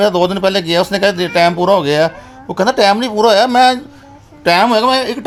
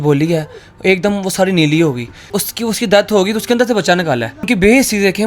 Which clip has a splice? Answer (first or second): second